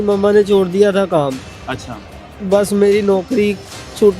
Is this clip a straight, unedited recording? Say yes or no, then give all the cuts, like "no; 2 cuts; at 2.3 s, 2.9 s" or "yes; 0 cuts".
yes; 0 cuts